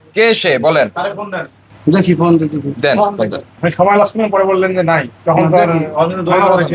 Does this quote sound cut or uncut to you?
cut